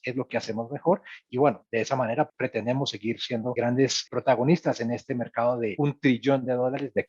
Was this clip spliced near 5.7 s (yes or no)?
yes